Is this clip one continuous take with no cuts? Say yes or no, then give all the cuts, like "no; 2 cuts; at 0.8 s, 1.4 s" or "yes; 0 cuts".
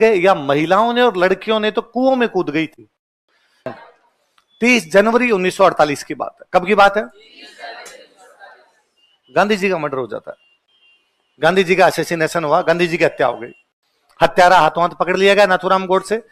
no; 1 cut; at 3.7 s